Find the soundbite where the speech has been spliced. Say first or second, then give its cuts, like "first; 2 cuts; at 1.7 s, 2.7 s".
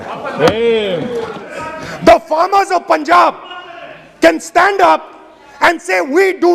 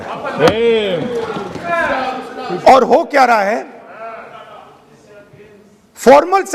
first; 1 cut; at 1.5 s